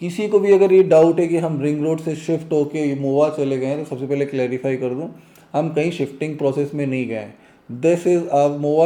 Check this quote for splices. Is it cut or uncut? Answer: uncut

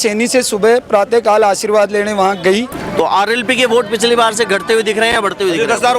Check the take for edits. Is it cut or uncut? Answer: cut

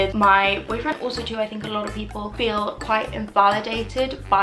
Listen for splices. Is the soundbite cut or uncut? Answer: cut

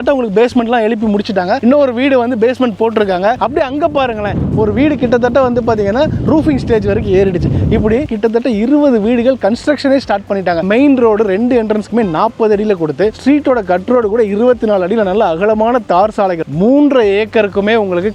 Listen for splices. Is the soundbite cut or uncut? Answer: cut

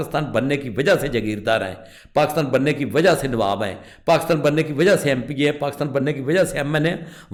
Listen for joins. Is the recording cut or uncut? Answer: uncut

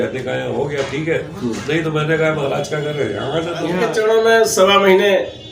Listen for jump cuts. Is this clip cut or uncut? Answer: cut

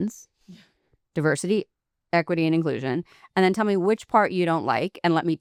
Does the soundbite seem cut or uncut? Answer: uncut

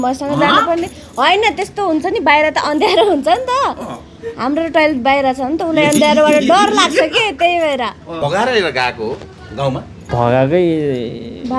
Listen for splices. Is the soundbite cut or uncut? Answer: cut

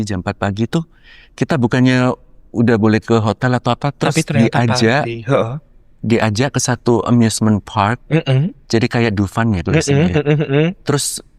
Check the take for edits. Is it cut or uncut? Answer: uncut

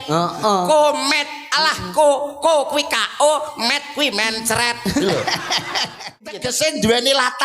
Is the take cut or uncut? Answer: cut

